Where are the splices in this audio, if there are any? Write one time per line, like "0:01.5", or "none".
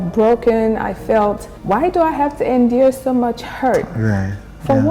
0:01.5